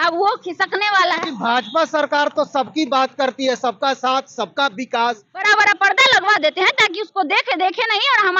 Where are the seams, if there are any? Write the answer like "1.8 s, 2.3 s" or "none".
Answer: 1.2 s, 5.4 s